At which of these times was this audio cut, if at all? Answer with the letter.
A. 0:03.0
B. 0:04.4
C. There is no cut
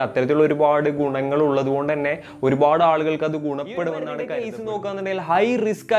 B